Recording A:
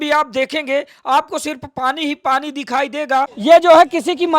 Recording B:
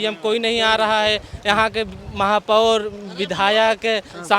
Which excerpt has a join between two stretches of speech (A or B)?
A